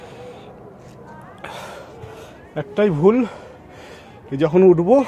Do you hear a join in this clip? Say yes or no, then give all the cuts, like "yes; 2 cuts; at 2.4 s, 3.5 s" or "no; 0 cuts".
no; 0 cuts